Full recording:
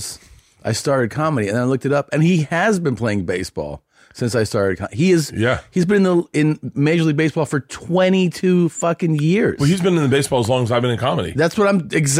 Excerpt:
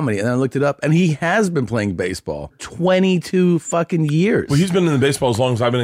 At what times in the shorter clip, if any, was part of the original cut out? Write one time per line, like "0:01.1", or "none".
0:02.6

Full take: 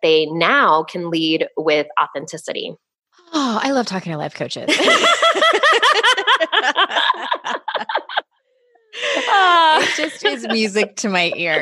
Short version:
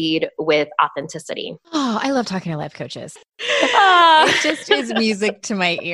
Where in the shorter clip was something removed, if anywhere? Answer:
0:01.5
0:02.9

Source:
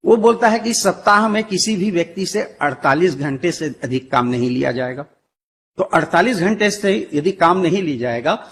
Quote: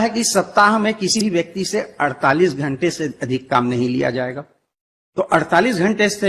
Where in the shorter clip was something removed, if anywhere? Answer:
0:01.2

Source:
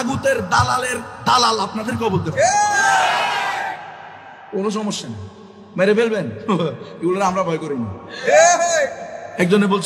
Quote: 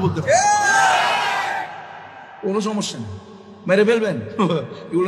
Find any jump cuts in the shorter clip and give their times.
none

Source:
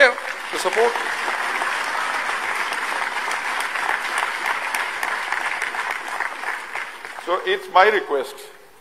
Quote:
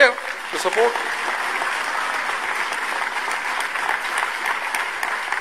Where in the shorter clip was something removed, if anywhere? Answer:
none

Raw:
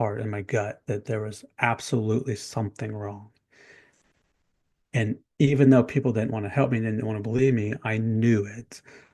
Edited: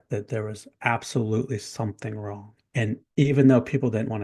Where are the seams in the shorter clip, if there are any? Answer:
0:03.0

